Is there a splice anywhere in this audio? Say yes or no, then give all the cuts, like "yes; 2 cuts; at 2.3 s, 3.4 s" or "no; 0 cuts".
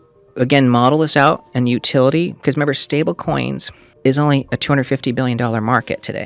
no; 0 cuts